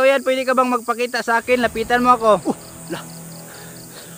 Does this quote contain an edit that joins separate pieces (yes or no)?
yes